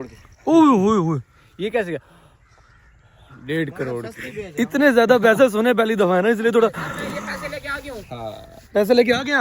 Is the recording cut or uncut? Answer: uncut